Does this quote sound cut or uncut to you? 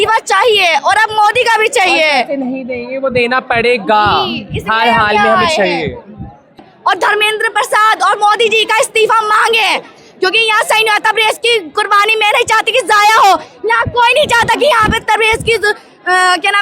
cut